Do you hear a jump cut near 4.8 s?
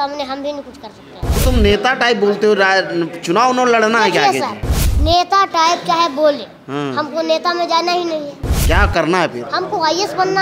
no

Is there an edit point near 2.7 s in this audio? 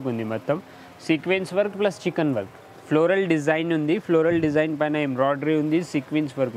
no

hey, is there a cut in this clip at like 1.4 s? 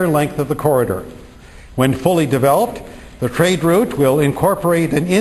yes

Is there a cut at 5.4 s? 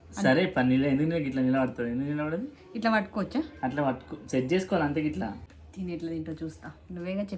yes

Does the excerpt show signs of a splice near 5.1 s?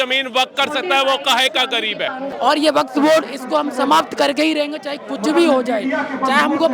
no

